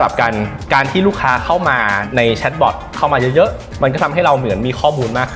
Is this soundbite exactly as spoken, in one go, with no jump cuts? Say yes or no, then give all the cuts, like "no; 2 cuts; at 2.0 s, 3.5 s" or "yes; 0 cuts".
yes; 0 cuts